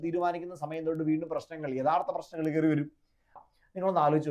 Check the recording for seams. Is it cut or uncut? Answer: cut